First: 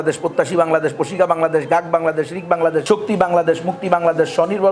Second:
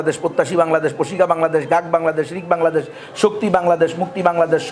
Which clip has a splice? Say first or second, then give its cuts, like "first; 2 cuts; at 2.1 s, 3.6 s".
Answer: first; 1 cut; at 2.8 s